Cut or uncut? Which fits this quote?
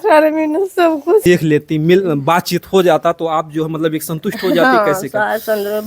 cut